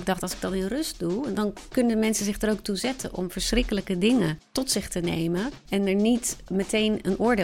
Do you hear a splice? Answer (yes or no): yes